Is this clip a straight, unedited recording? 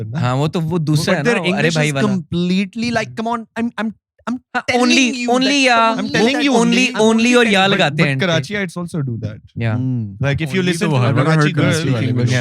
yes; 0 cuts

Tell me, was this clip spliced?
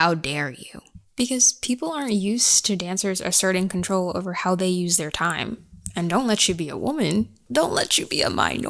yes; 1 cut; at 7.4 s

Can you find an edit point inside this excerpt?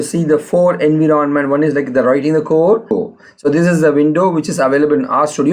yes; 1 cut; at 2.9 s

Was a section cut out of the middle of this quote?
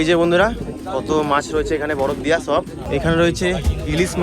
yes; 1 cut; at 2.8 s

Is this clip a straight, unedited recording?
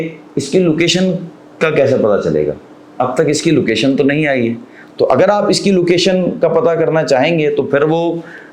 yes; 0 cuts

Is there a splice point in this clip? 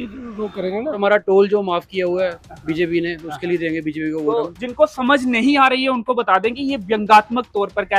yes; 1 cut; at 1.0 s

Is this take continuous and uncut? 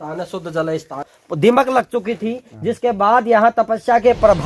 no; 1 cut; at 1.2 s

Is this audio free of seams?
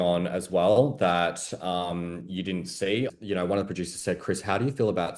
no; 1 cut; at 3.1 s

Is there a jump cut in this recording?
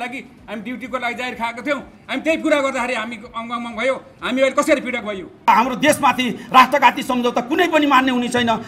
yes; 1 cut; at 5.5 s

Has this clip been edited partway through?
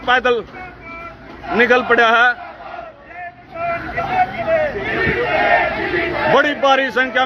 no; 0 cuts

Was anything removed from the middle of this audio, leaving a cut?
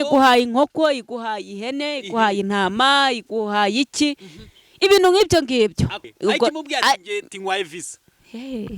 yes; 1 cut; at 6.0 s

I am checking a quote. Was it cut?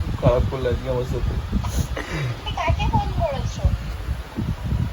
no; 0 cuts

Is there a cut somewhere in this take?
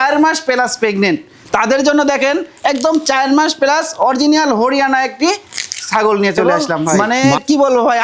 yes; 1 cut; at 6.9 s

